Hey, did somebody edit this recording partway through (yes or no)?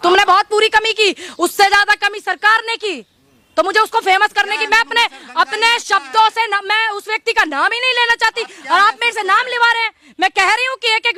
no